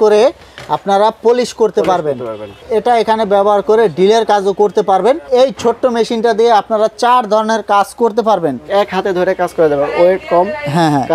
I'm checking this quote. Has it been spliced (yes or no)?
yes